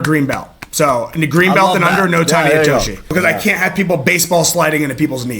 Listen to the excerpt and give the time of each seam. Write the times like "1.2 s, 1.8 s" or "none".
3.0 s